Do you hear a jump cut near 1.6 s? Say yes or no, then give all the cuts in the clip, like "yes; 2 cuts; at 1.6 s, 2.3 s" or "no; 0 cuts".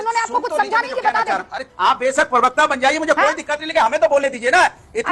yes; 1 cut; at 1.6 s